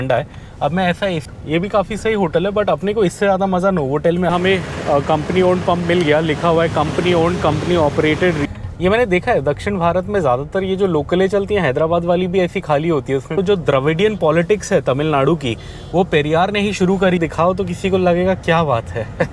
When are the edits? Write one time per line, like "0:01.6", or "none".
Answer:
0:01.2
0:04.3
0:08.4
0:13.3
0:17.2